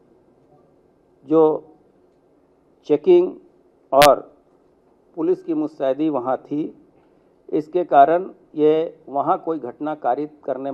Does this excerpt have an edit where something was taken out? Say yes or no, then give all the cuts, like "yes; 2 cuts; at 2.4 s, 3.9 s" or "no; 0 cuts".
no; 0 cuts